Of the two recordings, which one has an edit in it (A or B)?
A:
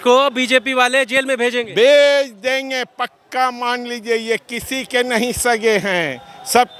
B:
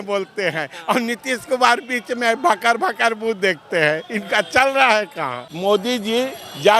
B